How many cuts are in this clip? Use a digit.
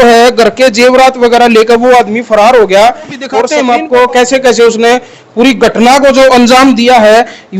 1